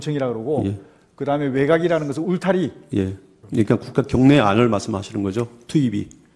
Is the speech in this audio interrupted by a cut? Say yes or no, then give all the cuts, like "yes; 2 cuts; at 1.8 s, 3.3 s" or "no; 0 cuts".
yes; 1 cut; at 3.3 s